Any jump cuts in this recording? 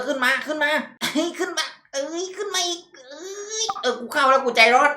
yes; 1 cut; at 1.0 s

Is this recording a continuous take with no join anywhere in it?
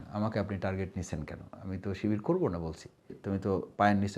no; 1 cut; at 3.2 s

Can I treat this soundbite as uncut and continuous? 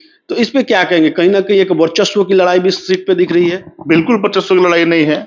yes; 0 cuts

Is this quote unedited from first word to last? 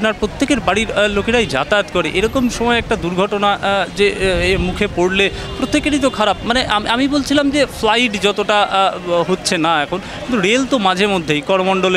yes; 0 cuts

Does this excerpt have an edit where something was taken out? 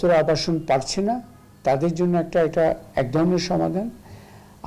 no; 0 cuts

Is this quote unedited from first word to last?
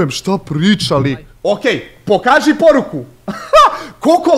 no; 1 cut; at 1.3 s

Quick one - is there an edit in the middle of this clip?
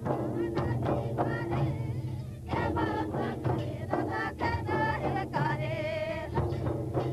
yes; 1 cut; at 3.6 s

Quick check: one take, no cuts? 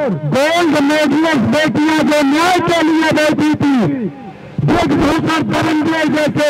yes; 0 cuts

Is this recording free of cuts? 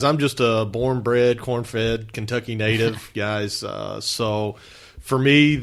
yes; 0 cuts

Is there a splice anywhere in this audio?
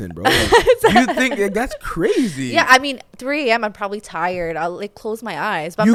no; 0 cuts

